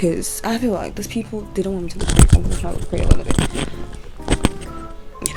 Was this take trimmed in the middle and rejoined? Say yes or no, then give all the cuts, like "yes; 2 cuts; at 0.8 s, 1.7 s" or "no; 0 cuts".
no; 0 cuts